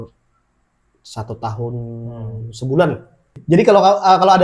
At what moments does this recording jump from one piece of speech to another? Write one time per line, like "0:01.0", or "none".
0:03.3